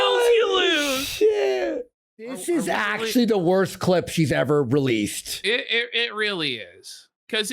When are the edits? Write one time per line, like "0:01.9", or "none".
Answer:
0:02.4

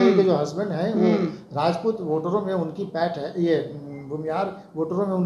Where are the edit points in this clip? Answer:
none

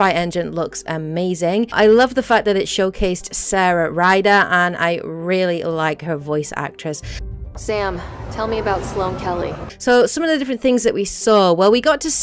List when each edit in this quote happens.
0:06.0

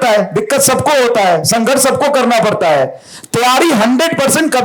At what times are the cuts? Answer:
none

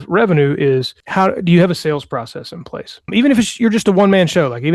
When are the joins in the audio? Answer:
0:01.0
0:03.1

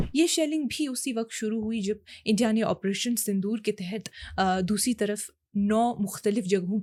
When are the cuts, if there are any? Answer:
none

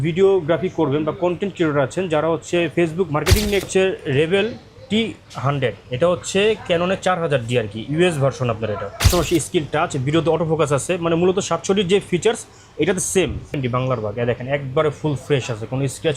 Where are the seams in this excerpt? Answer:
0:03.7
0:09.1
0:13.6

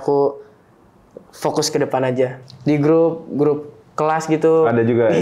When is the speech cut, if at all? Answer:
0:02.5

